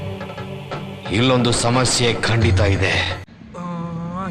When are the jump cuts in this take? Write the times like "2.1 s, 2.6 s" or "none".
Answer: 3.4 s